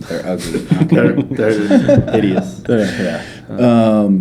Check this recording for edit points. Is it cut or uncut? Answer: uncut